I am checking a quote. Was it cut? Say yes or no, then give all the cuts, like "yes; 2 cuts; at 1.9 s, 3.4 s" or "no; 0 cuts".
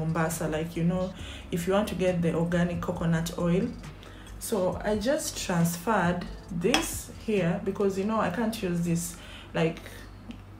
no; 0 cuts